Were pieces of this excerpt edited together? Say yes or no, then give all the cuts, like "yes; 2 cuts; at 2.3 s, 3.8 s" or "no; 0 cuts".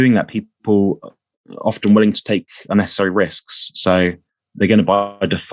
no; 0 cuts